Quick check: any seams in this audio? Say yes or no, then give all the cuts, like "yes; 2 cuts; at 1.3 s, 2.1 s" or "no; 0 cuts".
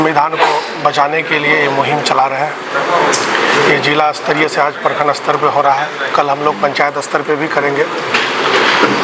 no; 0 cuts